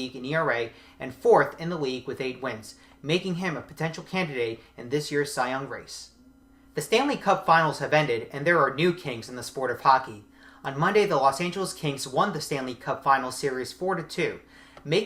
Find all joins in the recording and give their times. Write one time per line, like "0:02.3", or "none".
none